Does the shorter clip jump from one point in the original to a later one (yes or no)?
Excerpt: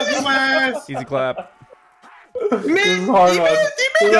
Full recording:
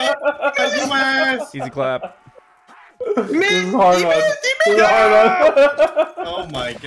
no